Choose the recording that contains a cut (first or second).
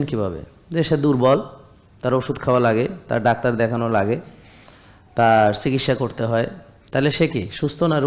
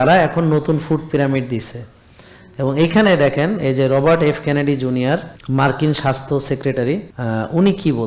second